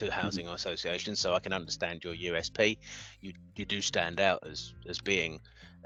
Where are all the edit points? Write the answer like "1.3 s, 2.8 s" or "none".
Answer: none